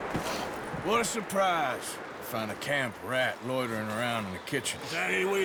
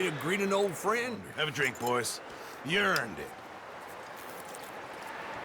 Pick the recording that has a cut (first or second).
second